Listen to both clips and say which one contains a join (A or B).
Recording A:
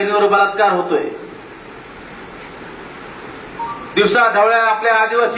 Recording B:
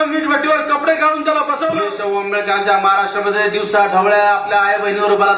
B